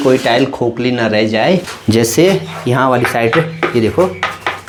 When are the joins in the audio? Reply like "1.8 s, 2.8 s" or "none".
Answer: none